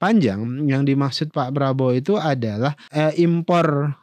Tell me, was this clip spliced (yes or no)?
yes